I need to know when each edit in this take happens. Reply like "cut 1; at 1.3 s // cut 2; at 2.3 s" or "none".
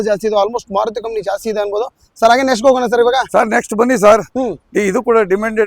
none

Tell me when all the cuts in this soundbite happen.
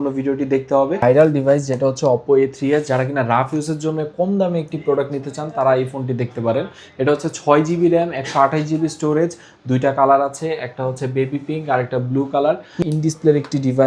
cut 1; at 1.0 s // cut 2; at 12.8 s

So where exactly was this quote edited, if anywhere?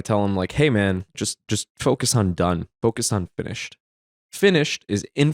cut 1; at 1.1 s // cut 2; at 4.0 s

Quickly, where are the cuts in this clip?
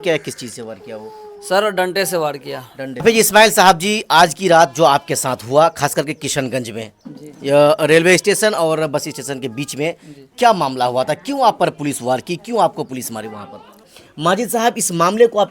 cut 1; at 3.0 s // cut 2; at 14.0 s

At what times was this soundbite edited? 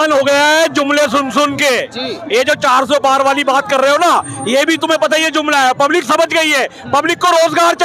none

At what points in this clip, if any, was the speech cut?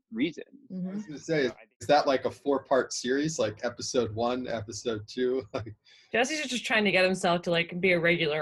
cut 1; at 1.2 s

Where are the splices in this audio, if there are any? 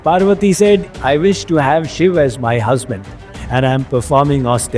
cut 1; at 0.9 s

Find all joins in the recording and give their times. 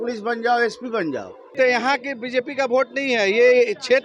cut 1; at 1.5 s

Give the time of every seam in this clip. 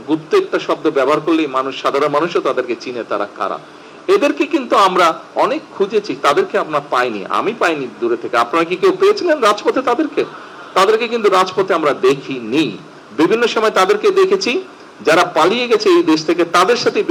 none

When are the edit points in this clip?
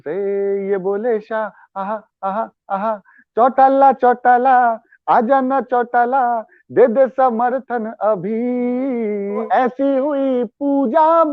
cut 1; at 9.4 s

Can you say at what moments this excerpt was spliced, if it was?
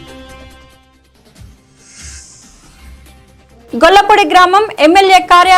cut 1; at 1.6 s

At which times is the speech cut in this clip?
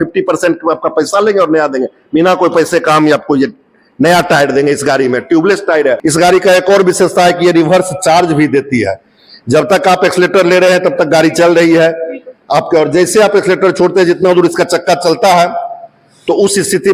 cut 1; at 6.0 s

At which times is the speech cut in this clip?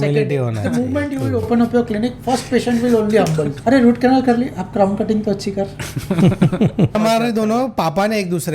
cut 1; at 3.5 s // cut 2; at 7.0 s

